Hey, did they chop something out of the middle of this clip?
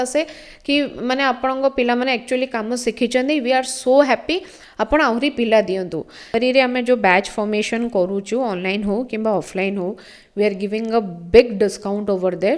yes; 1 cut; at 6.3 s

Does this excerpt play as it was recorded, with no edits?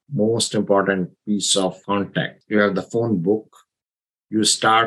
no; 1 cut; at 2.4 s

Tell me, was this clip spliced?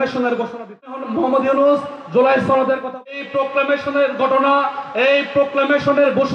yes; 2 cuts; at 1.0 s, 3.1 s

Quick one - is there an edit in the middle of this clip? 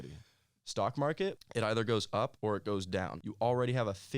yes; 3 cuts; at 1.4 s, 2.3 s, 3.2 s

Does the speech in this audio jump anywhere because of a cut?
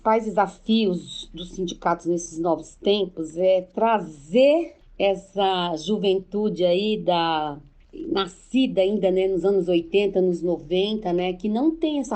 yes; 1 cut; at 4.8 s

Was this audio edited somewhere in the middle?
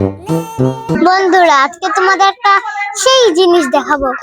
yes; 1 cut; at 1.0 s

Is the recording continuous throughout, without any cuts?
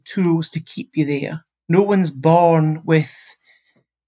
no; 1 cut; at 1.5 s

